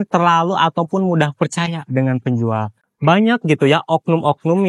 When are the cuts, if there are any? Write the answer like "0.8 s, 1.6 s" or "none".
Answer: 2.9 s